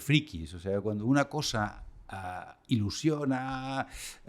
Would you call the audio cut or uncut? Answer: uncut